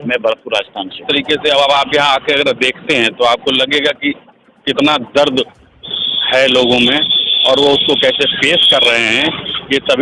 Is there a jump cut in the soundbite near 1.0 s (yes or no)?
yes